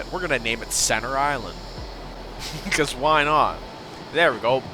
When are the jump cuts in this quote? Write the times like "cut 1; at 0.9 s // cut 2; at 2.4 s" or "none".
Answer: none